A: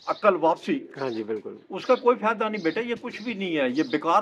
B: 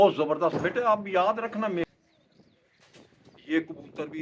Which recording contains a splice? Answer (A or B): B